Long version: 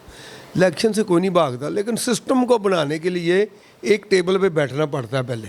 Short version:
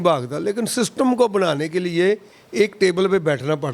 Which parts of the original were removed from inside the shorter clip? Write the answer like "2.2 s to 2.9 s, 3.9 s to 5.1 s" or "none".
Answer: none